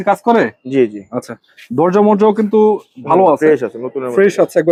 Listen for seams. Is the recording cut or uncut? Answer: uncut